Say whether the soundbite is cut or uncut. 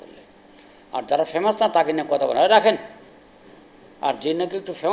uncut